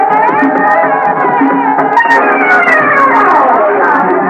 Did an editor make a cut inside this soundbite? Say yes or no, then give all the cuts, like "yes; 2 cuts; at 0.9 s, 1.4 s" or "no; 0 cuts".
no; 0 cuts